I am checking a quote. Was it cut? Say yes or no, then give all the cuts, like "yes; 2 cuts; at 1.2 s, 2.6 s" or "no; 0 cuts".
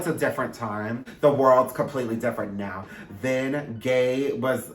yes; 1 cut; at 1.1 s